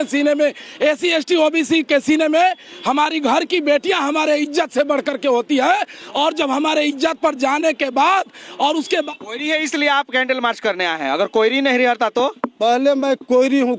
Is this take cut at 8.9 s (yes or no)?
yes